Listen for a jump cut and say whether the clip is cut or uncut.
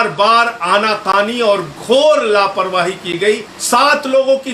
cut